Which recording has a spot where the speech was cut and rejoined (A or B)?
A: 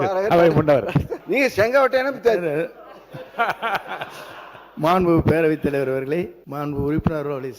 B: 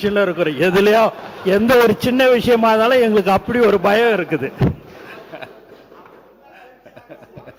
A